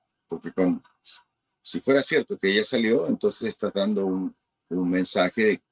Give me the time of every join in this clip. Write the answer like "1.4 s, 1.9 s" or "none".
none

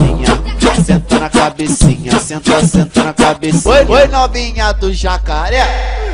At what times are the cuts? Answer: 3.4 s

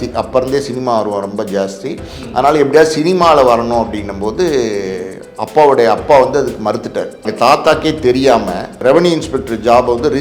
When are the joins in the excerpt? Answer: 7.3 s, 8.7 s

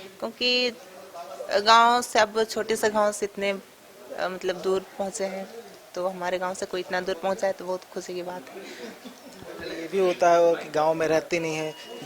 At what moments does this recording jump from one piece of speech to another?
none

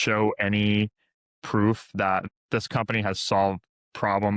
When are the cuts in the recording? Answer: none

